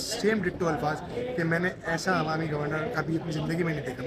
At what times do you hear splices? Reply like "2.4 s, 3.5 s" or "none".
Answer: none